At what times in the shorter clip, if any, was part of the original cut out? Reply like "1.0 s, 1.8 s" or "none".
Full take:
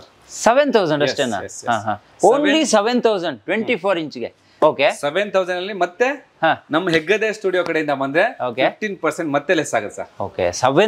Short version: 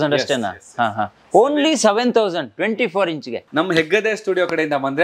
3.5 s